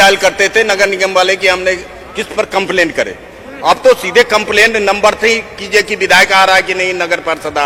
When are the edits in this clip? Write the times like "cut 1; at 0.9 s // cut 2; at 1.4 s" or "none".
none